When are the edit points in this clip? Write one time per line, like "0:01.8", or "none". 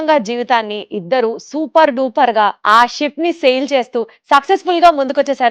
0:02.6